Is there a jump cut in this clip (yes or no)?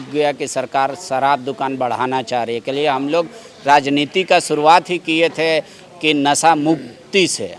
no